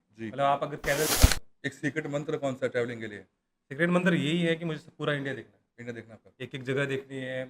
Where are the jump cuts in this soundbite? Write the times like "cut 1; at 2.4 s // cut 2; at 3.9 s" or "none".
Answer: cut 1; at 1.2 s